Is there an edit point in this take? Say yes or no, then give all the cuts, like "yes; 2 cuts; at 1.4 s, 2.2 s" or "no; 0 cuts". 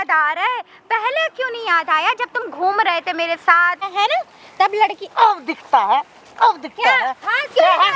yes; 1 cut; at 3.8 s